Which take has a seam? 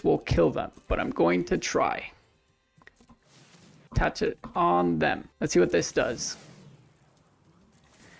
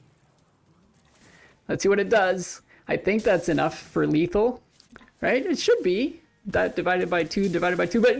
first; 3 cuts; at 2.8 s, 3.9 s, 5.3 s

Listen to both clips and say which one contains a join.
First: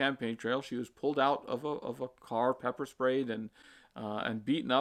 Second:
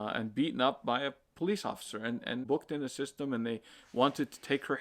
second; 1 cut; at 2.4 s

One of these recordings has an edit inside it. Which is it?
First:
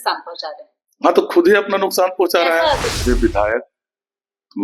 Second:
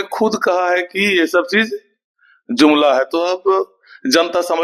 first; 1 cut; at 3.0 s

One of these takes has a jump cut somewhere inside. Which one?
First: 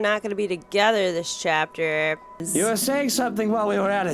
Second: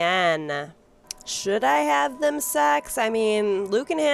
first; 1 cut; at 2.4 s

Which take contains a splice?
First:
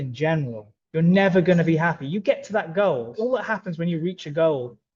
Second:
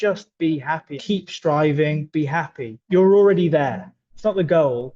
second; 3 cuts; at 0.9 s, 2.0 s, 4.0 s

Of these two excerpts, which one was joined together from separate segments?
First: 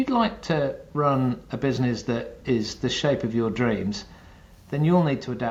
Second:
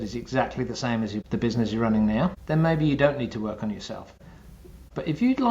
second; 3 cuts; at 1.2 s, 2.4 s, 4.4 s

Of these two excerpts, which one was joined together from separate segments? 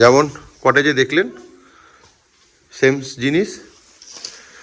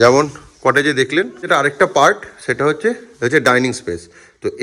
second; 1 cut; at 1.5 s

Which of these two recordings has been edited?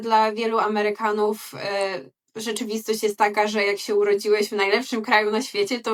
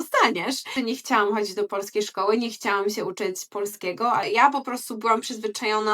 second; 2 cuts; at 0.8 s, 4.2 s

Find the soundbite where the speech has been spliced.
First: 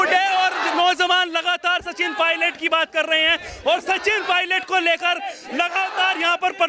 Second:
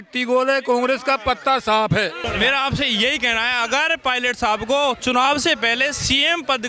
second; 1 cut; at 2.2 s

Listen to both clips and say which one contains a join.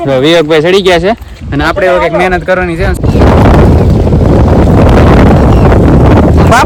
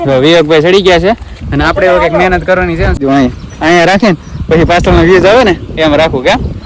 second; 1 cut; at 3.0 s

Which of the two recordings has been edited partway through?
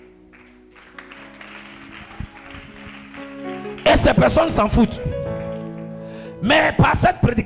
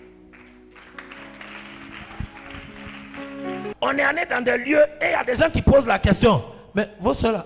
second; 1 cut; at 3.7 s

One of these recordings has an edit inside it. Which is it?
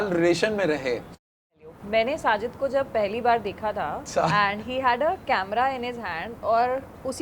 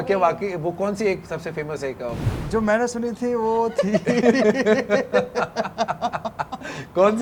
first; 2 cuts; at 1.5 s, 4.0 s

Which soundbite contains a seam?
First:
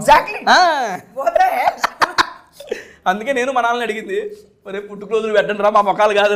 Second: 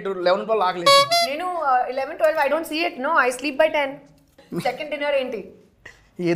second; 1 cut; at 4.4 s

